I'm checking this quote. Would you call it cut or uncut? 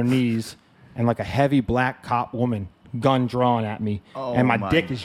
uncut